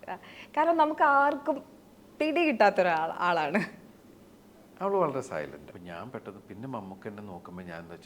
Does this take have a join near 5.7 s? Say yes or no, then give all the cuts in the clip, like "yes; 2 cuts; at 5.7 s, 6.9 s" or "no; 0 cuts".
yes; 1 cut; at 5.7 s